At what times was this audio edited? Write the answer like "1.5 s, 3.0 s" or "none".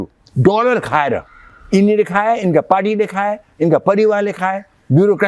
none